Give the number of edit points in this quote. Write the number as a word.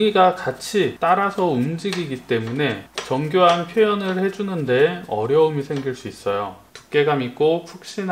three